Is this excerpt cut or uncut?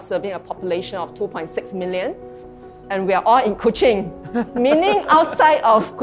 cut